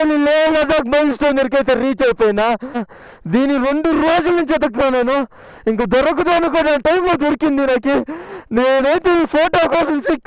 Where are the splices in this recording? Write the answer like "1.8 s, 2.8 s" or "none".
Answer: 2.9 s